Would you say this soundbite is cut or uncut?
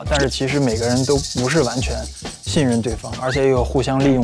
uncut